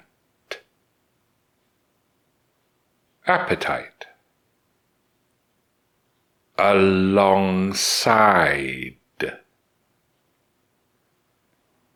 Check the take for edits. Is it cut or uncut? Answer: uncut